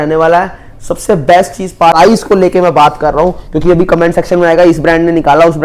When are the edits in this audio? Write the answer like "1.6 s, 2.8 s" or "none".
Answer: 1.9 s